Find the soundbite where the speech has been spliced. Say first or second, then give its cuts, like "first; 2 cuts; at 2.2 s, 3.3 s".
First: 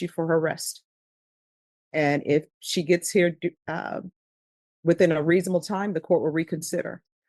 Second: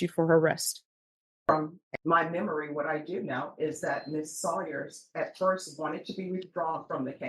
second; 1 cut; at 1.5 s